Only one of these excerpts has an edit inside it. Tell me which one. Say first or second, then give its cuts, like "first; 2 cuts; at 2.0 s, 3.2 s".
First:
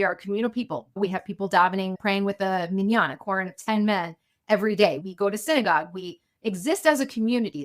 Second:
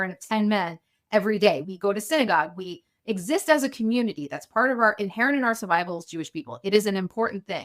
first; 1 cut; at 2.0 s